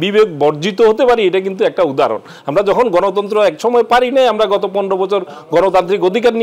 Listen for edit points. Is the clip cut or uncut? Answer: uncut